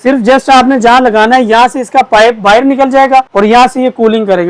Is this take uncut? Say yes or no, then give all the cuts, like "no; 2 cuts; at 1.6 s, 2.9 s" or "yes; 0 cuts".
no; 1 cut; at 3.3 s